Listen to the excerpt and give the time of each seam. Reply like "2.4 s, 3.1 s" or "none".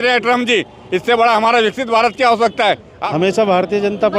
2.9 s